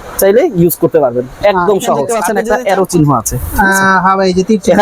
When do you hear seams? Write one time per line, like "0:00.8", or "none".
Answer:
0:02.2

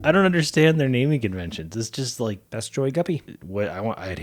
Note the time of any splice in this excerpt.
0:02.4
0:03.4

